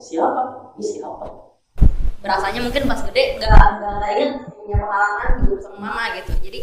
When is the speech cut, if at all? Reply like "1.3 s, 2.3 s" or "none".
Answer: 1.7 s